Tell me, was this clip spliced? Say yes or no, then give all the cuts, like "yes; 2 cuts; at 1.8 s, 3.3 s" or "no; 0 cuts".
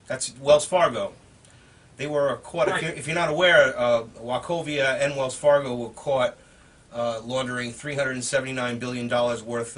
no; 0 cuts